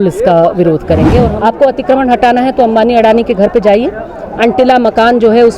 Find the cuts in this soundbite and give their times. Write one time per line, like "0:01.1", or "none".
0:01.3